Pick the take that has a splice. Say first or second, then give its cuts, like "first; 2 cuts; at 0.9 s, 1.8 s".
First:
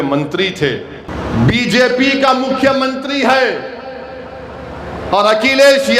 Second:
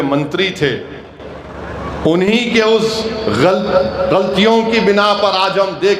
first; 1 cut; at 1.0 s